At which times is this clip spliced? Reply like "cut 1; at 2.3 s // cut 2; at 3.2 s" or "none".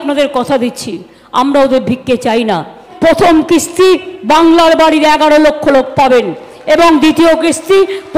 cut 1; at 2.8 s